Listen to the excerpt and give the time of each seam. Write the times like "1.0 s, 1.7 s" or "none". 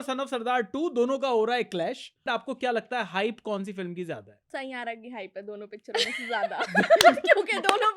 2.2 s, 4.3 s